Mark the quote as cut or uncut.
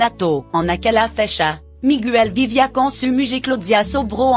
uncut